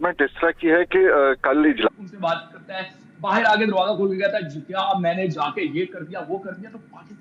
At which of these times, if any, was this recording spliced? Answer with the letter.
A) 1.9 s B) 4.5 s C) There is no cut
A